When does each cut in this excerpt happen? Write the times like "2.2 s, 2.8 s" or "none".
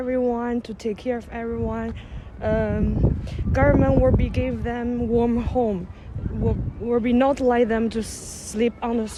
none